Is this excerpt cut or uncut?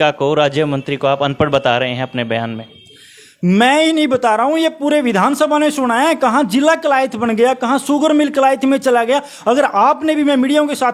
uncut